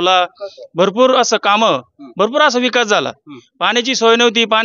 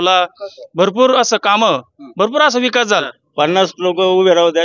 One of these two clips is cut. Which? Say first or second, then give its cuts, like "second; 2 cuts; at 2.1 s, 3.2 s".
second; 1 cut; at 3.2 s